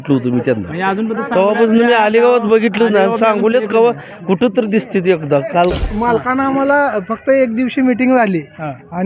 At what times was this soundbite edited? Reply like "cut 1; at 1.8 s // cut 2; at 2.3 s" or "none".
cut 1; at 5.9 s

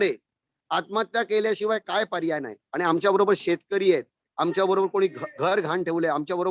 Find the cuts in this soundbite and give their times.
cut 1; at 2.6 s

